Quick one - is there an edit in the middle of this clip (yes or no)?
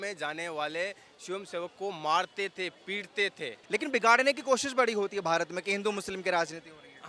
yes